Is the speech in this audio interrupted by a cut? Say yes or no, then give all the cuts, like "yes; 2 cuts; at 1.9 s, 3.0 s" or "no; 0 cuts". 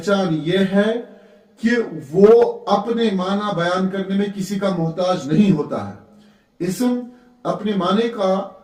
no; 0 cuts